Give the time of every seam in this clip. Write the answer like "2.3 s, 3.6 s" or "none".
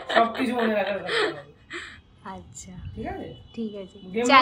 none

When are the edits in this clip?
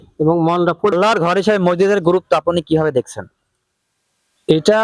0.9 s

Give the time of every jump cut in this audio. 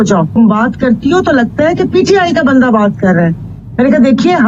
none

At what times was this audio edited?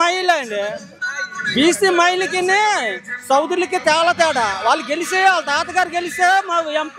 none

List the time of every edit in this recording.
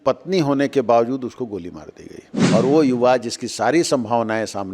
2.3 s

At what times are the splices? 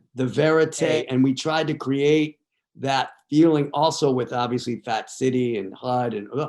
0.9 s

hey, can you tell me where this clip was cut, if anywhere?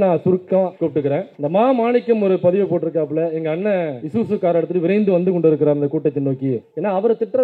1.1 s, 4.0 s

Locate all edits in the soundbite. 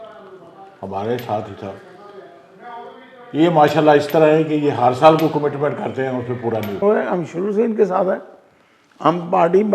6.8 s

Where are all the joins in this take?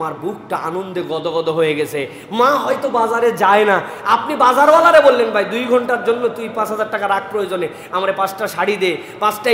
none

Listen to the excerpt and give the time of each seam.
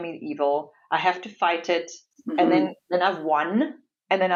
none

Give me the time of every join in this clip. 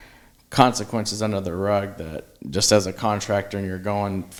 none

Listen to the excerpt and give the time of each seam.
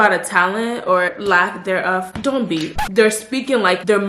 1.1 s, 2.8 s

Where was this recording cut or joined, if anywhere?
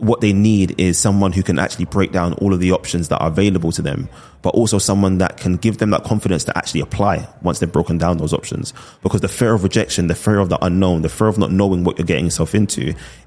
none

